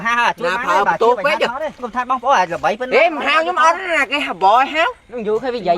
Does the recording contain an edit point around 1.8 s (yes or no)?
yes